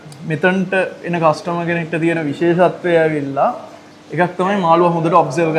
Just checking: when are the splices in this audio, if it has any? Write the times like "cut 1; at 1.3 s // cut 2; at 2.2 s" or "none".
none